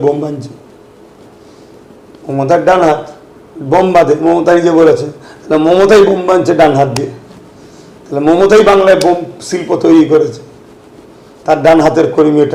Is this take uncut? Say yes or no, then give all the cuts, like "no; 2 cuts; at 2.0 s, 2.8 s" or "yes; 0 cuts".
yes; 0 cuts